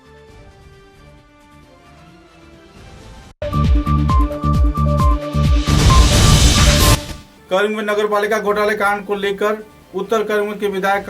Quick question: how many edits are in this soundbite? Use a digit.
2